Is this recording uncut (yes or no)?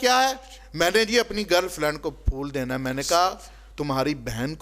yes